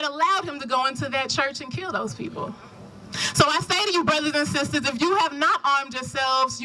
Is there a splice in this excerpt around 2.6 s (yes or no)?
yes